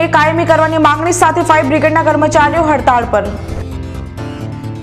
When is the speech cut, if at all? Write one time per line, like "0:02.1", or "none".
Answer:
none